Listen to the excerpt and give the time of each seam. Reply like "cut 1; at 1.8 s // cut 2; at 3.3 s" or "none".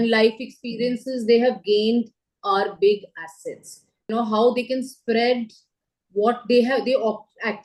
cut 1; at 4.1 s

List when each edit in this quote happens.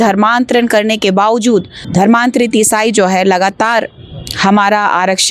cut 1; at 1.8 s

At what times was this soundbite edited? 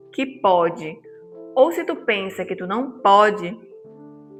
none

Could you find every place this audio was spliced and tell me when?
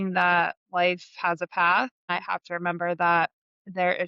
cut 1; at 2.1 s

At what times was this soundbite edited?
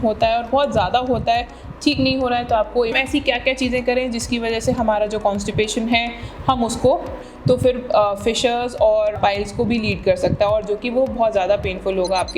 cut 1; at 2.9 s // cut 2; at 7.3 s // cut 3; at 9.2 s

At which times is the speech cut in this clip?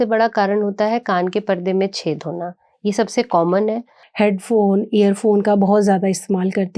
cut 1; at 4.0 s

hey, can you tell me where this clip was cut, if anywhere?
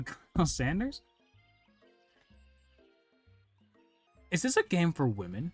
cut 1; at 4.1 s

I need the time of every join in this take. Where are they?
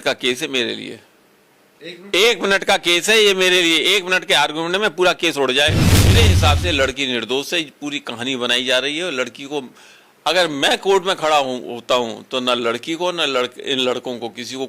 cut 1; at 6.1 s

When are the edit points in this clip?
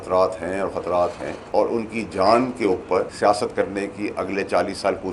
cut 1; at 1.3 s // cut 2; at 3.1 s

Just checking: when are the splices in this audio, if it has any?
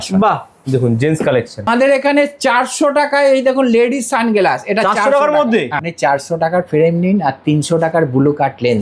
cut 1; at 1.7 s // cut 2; at 5.8 s

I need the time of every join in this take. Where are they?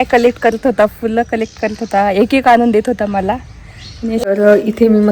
cut 1; at 4.2 s

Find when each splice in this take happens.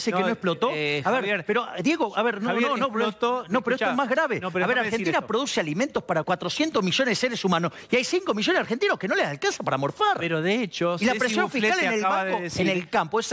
cut 1; at 6.2 s

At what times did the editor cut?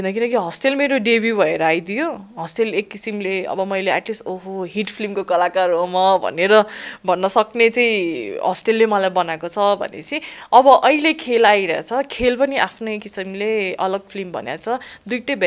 none

